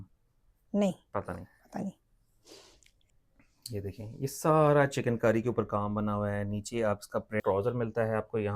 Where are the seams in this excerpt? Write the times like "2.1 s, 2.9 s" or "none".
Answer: 2.9 s, 7.4 s